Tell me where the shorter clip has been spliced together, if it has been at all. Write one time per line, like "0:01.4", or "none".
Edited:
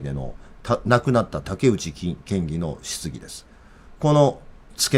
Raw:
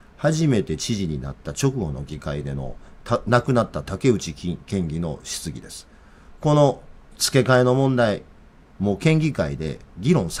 none